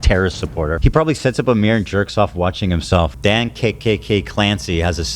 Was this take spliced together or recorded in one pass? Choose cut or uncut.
cut